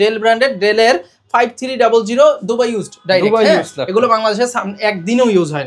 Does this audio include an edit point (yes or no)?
no